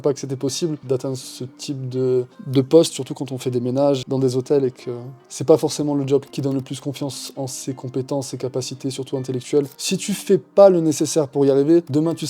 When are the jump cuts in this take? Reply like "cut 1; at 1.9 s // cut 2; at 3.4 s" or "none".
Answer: cut 1; at 0.8 s // cut 2; at 4.0 s // cut 3; at 6.3 s // cut 4; at 9.8 s